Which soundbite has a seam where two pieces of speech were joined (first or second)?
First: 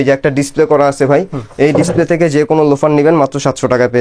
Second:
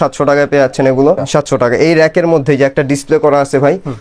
second